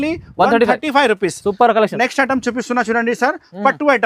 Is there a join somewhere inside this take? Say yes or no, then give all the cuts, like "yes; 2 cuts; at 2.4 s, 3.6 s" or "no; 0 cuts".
no; 0 cuts